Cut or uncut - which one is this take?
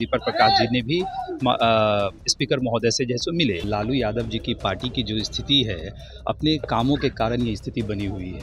cut